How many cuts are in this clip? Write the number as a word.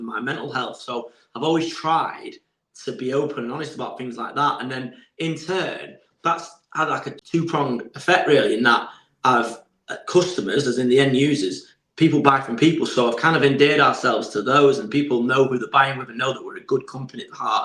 one